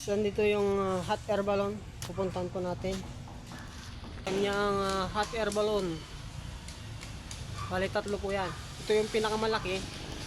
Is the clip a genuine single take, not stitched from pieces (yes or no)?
no